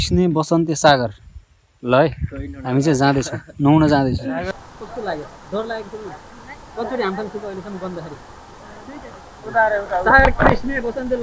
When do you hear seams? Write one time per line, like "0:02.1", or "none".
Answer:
0:04.5